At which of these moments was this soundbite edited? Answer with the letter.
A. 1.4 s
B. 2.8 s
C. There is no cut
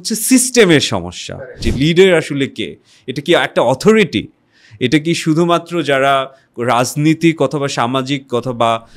A